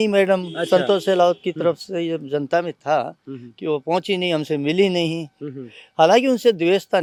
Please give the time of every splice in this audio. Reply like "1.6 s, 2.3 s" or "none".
none